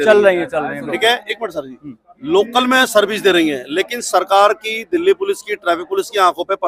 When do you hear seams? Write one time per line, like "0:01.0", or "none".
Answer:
none